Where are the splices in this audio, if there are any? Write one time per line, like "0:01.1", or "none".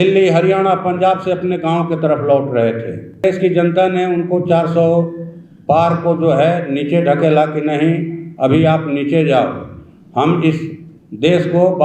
0:03.2